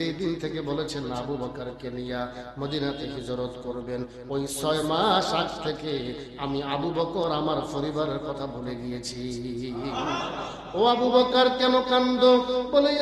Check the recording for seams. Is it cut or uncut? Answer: uncut